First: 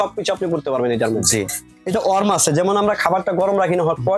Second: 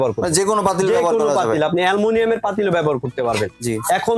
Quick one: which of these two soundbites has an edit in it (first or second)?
first